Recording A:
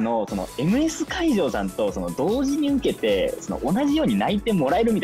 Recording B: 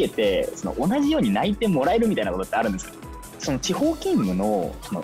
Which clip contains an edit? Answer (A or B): B